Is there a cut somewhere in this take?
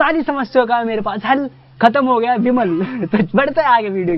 yes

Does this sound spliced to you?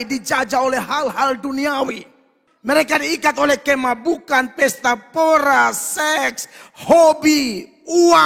no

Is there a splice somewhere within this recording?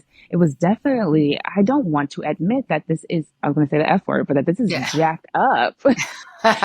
yes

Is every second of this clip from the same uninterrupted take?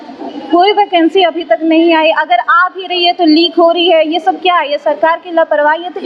yes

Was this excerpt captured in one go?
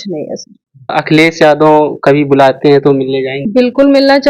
no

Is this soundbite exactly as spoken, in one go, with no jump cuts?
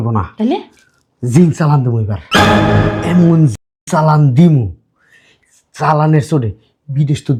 yes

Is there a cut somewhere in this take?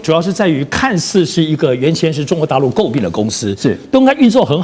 no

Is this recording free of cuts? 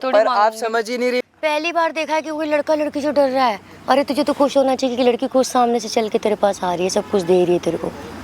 no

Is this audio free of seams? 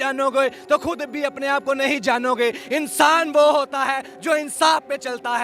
yes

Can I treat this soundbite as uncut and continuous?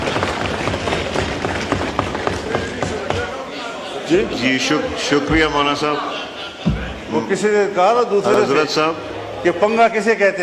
yes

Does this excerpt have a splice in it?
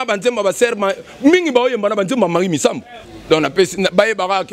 yes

